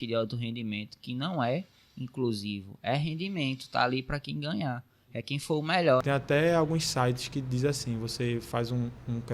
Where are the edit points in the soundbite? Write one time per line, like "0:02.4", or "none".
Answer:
0:06.0